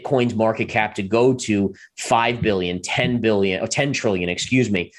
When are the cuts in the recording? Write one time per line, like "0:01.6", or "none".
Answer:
none